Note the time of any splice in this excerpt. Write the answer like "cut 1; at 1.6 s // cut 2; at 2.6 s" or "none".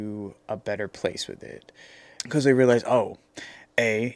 cut 1; at 2.1 s